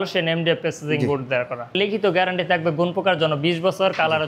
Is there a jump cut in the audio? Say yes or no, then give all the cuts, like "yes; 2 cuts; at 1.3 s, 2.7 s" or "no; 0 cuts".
yes; 1 cut; at 1.8 s